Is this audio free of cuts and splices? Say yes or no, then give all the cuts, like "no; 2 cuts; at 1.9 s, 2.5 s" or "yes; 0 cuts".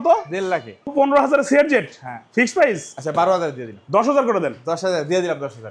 no; 1 cut; at 0.9 s